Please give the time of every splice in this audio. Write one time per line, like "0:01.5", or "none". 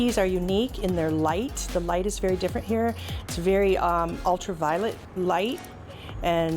0:05.0